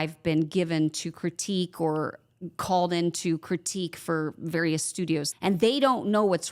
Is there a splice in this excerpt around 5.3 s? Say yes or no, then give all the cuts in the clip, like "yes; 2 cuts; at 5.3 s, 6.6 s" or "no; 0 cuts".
yes; 1 cut; at 5.3 s